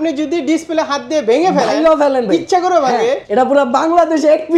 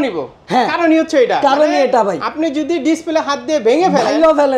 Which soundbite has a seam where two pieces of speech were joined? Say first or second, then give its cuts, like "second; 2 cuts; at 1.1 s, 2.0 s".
first; 1 cut; at 3.2 s